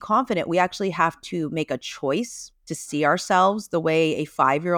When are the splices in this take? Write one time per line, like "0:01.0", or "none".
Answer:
none